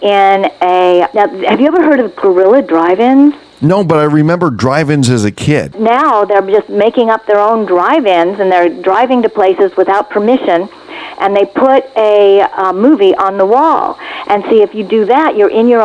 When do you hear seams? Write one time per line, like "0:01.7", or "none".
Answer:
0:01.1
0:03.5
0:05.7